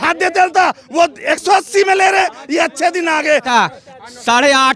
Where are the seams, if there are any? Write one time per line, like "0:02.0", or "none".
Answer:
0:03.5